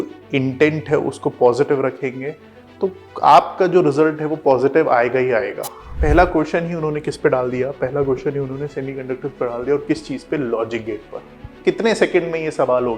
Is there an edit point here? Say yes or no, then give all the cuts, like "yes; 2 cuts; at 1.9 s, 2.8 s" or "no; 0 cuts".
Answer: yes; 2 cuts; at 5.9 s, 11.5 s